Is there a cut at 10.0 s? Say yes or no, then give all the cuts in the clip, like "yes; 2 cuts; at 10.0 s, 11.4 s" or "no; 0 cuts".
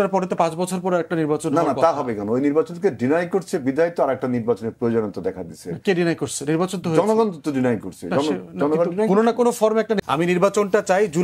yes; 1 cut; at 10.0 s